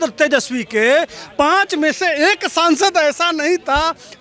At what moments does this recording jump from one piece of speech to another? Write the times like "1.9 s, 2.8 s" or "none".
none